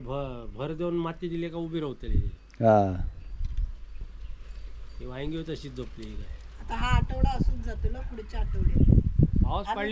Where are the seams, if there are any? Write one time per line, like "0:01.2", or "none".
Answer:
none